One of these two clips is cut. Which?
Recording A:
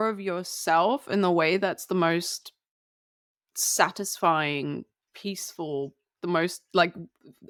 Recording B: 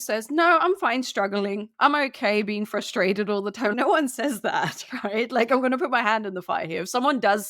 B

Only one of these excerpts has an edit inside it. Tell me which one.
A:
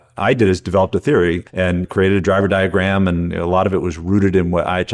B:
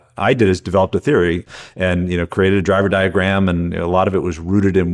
A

